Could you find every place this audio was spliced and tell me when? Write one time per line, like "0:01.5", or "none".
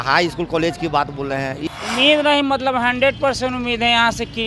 0:01.6